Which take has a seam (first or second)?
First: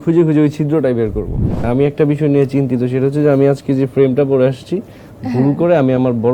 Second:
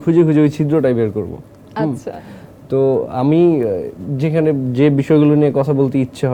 first